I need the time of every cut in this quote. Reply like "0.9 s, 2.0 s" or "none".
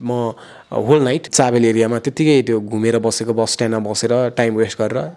1.3 s